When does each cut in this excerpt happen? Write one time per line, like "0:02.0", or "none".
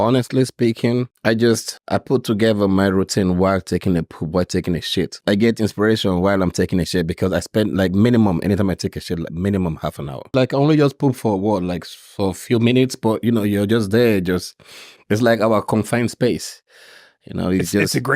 0:01.1
0:01.7
0:05.2
0:10.3